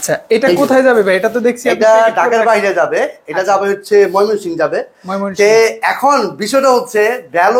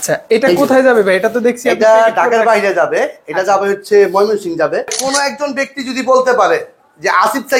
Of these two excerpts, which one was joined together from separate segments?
second; 1 cut; at 5.1 s

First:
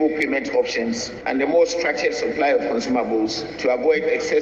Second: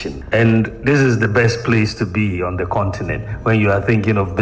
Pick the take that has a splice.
first; 2 cuts; at 1.1 s, 3.5 s

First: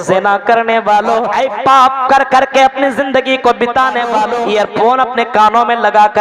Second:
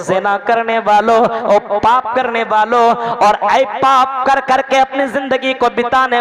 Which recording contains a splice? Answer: first; 2 cuts; at 1.3 s, 4.3 s

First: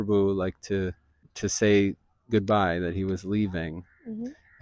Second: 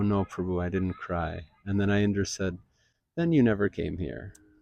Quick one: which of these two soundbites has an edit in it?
first; 1 cut; at 1.3 s

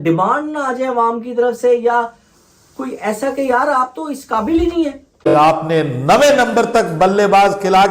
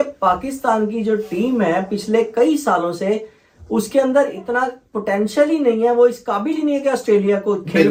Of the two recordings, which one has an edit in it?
first; 1 cut; at 5.3 s

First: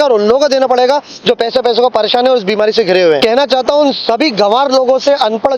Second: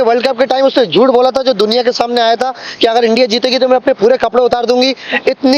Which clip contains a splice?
first; 1 cut; at 3.2 s

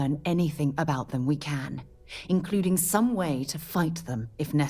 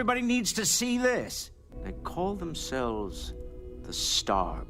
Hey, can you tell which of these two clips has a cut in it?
second; 1 cut; at 2.2 s

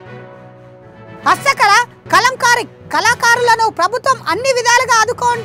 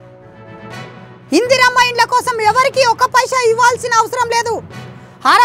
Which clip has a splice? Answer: first; 1 cut; at 1.0 s

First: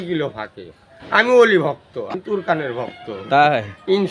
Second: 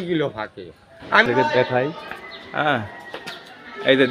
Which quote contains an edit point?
second; 1 cut; at 1.3 s

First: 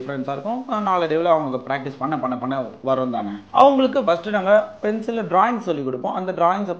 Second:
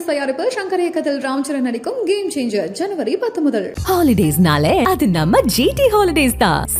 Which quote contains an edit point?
first; 2 cuts; at 3.4 s, 4.8 s

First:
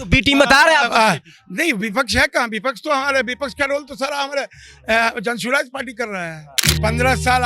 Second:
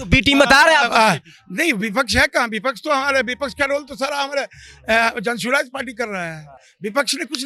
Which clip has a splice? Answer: first; 1 cut; at 6.5 s

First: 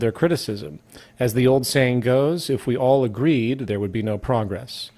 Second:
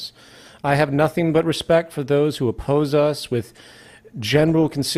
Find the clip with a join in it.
first; 1 cut; at 3.7 s

